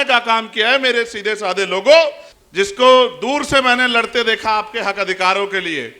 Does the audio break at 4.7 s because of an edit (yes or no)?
no